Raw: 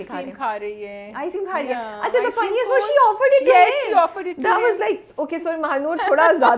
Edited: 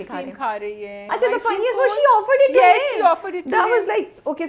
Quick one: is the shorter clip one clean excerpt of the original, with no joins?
no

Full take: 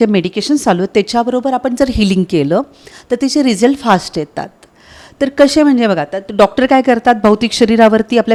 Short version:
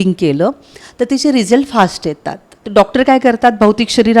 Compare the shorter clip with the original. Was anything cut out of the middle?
yes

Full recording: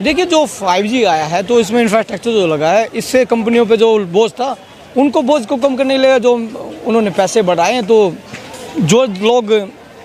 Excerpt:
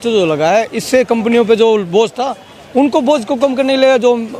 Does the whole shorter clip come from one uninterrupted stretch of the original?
yes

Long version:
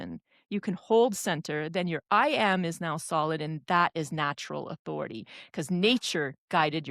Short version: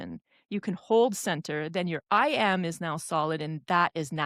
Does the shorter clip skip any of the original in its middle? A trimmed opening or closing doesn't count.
no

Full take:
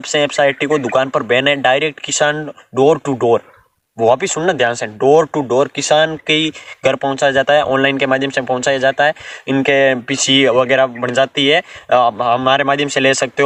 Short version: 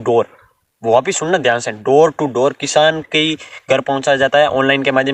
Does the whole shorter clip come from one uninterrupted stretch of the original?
yes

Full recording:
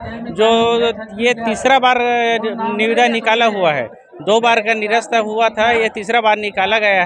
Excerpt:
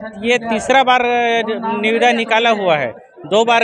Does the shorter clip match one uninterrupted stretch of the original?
yes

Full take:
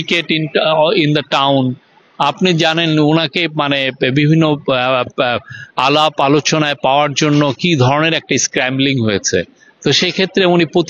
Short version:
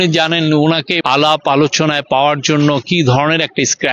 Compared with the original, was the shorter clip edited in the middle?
yes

